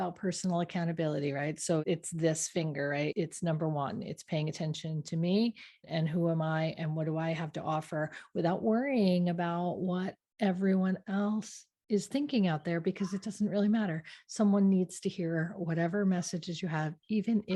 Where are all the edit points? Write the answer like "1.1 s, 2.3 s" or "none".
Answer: 1.8 s, 3.1 s, 5.8 s